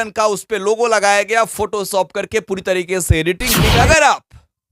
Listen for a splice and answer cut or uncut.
cut